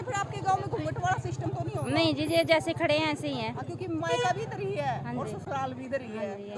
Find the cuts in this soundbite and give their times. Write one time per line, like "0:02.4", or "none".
none